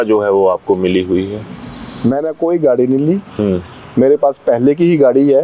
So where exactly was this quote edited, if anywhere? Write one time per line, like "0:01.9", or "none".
none